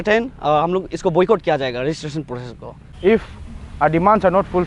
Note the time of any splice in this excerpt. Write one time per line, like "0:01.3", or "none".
0:02.9